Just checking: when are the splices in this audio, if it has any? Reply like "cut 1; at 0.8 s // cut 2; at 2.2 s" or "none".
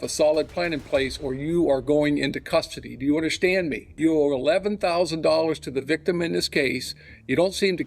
cut 1; at 3.9 s